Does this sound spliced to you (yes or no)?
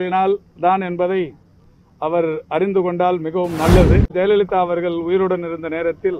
yes